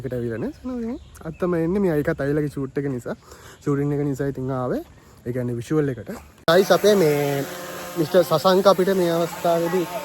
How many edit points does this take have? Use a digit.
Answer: 1